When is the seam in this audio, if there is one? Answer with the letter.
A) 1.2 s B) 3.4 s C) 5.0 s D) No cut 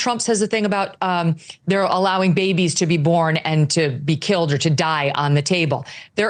D